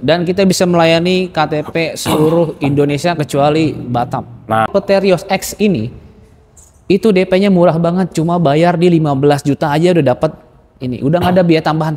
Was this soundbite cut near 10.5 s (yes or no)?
no